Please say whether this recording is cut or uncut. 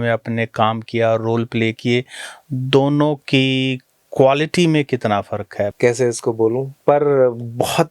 cut